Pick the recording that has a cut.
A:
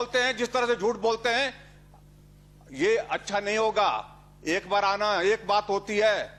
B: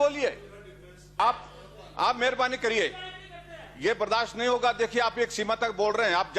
B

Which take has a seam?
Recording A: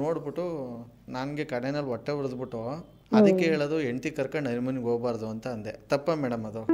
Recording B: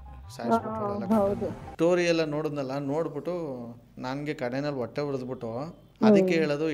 B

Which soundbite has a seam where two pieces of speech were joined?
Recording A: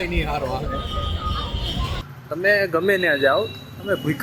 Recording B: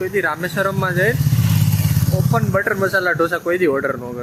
A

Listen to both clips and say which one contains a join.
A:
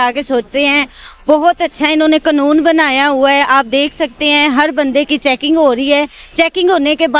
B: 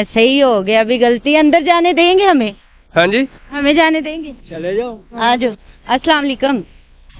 B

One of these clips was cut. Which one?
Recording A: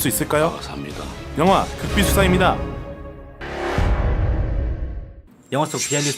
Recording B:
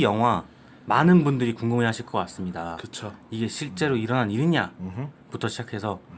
A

